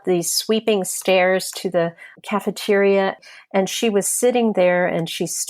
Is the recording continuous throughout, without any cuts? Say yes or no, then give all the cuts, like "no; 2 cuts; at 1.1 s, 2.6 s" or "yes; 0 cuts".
no; 2 cuts; at 2.1 s, 3.3 s